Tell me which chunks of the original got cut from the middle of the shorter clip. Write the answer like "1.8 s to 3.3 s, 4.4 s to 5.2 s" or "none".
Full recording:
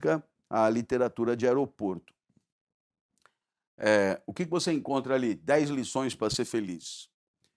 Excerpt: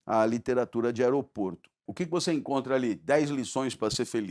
2.3 s to 4.3 s